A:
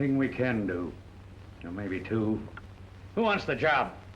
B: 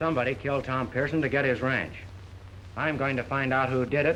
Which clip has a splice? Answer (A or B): A